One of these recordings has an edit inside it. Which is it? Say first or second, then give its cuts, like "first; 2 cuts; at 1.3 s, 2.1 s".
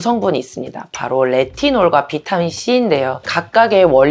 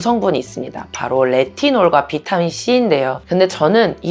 second; 1 cut; at 3.2 s